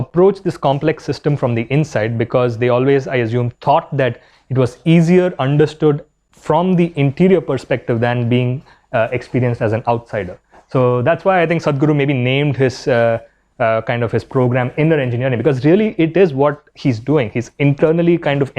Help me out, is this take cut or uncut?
uncut